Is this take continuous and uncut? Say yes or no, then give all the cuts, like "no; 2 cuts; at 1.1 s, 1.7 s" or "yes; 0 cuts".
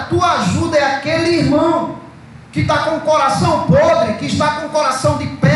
yes; 0 cuts